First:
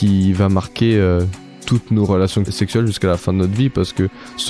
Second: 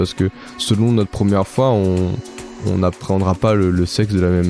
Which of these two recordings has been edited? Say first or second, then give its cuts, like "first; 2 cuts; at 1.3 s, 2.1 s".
first; 1 cut; at 2.5 s